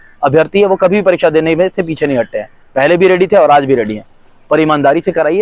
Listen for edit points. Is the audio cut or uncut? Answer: uncut